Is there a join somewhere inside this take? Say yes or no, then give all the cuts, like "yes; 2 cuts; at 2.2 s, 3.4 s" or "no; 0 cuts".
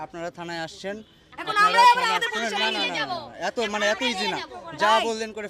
no; 0 cuts